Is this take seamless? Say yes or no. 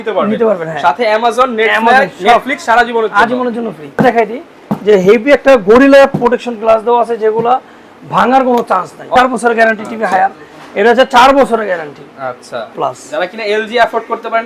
no